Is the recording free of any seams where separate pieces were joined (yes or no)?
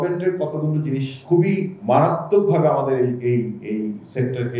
no